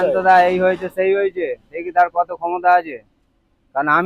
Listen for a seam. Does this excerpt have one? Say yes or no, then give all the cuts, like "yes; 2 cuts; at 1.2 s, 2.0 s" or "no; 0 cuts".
no; 0 cuts